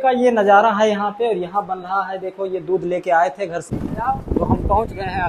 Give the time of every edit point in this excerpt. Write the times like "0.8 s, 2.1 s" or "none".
3.6 s